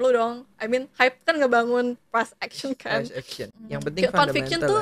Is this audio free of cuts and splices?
no; 1 cut; at 3.4 s

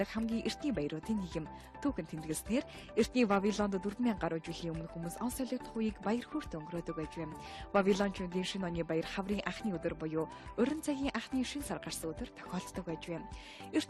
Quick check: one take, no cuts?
no; 1 cut; at 5.4 s

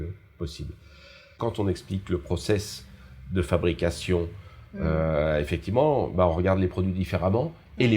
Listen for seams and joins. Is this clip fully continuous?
no; 1 cut; at 1.4 s

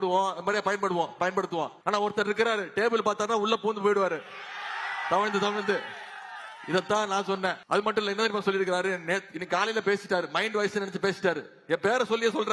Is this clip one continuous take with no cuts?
no; 2 cuts; at 1.8 s, 7.6 s

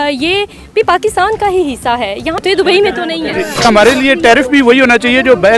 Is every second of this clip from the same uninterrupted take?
no; 2 cuts; at 2.4 s, 3.6 s

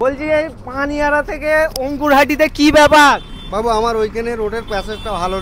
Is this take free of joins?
no; 1 cut; at 3.4 s

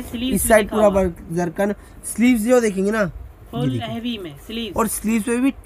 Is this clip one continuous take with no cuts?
yes; 0 cuts

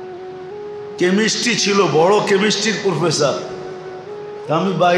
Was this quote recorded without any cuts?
no; 1 cut; at 1.0 s

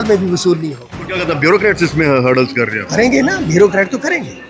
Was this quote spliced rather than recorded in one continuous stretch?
yes; 1 cut; at 1.2 s

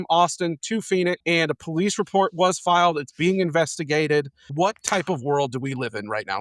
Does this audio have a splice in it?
yes; 2 cuts; at 1.2 s, 4.4 s

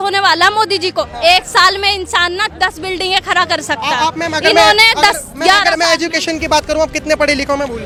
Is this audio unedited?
yes; 0 cuts

